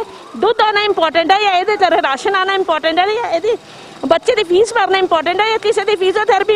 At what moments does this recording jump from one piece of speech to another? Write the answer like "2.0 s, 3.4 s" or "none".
none